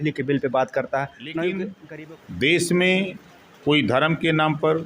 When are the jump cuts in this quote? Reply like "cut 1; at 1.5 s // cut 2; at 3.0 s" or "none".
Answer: cut 1; at 1.8 s